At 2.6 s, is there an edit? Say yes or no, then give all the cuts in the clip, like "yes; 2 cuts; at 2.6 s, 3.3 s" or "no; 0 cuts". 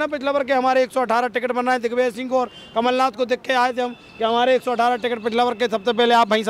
no; 0 cuts